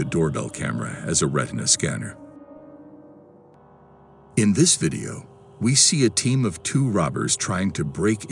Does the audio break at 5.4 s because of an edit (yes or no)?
no